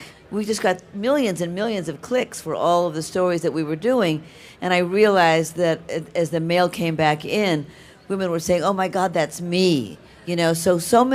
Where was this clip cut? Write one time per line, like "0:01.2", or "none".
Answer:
0:03.6